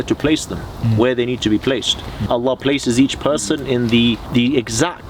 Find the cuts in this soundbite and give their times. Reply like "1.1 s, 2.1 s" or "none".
2.2 s, 4.2 s